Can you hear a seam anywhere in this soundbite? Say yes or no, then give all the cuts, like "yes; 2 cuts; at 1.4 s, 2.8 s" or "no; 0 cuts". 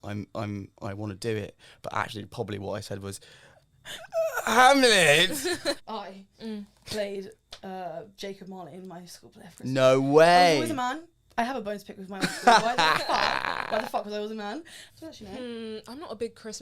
yes; 2 cuts; at 5.8 s, 14.8 s